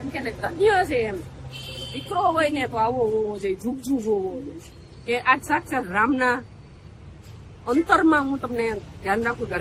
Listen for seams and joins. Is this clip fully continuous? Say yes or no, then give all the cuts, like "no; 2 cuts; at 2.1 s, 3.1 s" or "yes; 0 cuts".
yes; 0 cuts